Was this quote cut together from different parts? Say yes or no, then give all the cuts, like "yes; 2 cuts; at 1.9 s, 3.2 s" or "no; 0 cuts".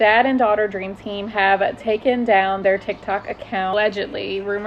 yes; 1 cut; at 3.7 s